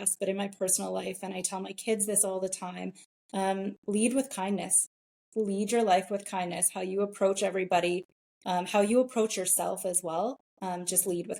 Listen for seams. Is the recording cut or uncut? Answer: uncut